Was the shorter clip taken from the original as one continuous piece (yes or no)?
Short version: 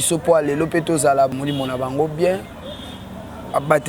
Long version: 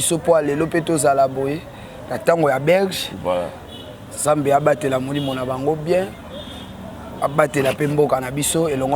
no